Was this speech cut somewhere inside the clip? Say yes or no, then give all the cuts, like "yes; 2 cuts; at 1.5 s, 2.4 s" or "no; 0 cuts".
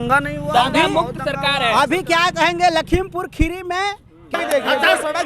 yes; 1 cut; at 4.3 s